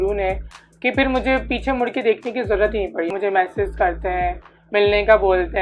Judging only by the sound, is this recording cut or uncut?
cut